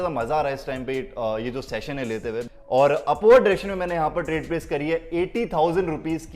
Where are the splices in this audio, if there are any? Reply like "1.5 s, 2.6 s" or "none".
2.5 s